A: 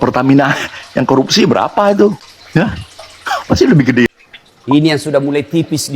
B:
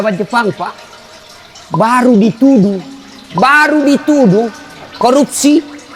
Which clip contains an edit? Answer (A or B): A